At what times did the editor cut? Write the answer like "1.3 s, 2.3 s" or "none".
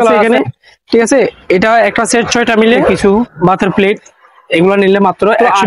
2.9 s